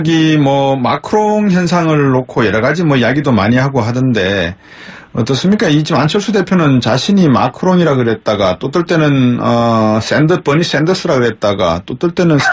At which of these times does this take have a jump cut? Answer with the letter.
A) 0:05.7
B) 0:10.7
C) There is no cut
B